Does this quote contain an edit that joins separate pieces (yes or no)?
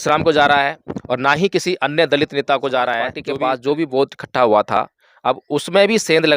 yes